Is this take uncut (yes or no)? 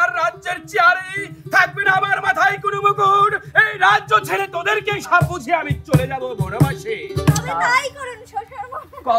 yes